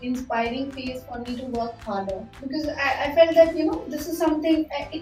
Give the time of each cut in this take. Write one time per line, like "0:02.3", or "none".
none